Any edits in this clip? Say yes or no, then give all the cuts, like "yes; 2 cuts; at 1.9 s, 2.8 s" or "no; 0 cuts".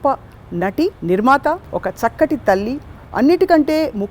yes; 2 cuts; at 1.0 s, 1.7 s